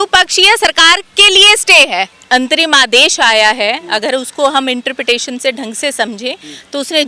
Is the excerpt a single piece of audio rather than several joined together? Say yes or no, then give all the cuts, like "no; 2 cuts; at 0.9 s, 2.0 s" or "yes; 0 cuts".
no; 1 cut; at 2.2 s